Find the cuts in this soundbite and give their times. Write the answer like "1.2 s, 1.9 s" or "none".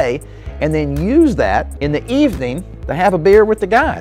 1.7 s